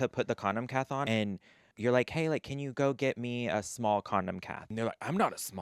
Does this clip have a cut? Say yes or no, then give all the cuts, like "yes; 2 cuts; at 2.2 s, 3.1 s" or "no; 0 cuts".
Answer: yes; 2 cuts; at 1.0 s, 4.7 s